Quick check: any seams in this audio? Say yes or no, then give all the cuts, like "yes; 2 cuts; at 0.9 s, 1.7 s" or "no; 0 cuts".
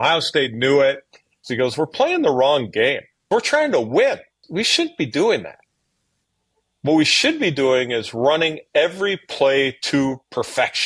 yes; 3 cuts; at 1.5 s, 3.3 s, 4.4 s